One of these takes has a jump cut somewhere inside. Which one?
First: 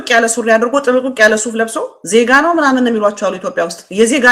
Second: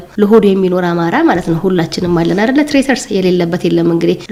first; 1 cut; at 1.9 s

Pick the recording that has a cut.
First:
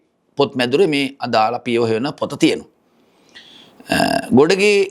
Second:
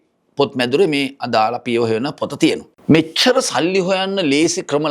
second; 1 cut; at 2.7 s

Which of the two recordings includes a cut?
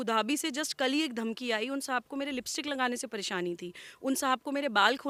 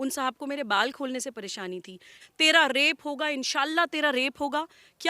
second; 1 cut; at 2.2 s

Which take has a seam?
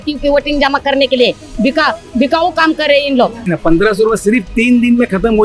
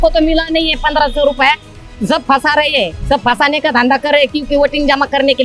first; 1 cut; at 3.5 s

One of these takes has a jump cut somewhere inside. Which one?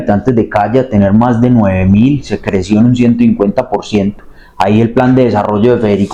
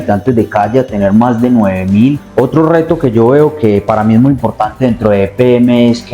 second; 1 cut; at 2.2 s

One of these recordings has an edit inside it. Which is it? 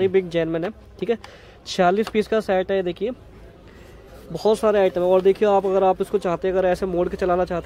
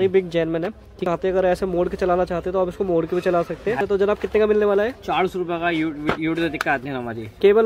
second; 2 cuts; at 1.0 s, 3.8 s

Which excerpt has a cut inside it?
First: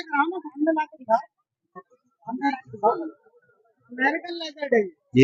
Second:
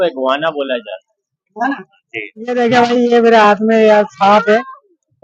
second; 1 cut; at 2.5 s

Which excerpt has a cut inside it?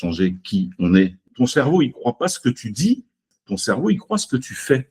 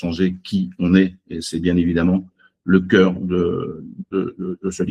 first; 2 cuts; at 1.3 s, 3.3 s

